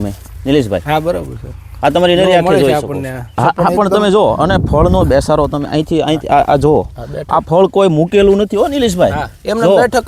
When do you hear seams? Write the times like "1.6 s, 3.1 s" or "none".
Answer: 3.4 s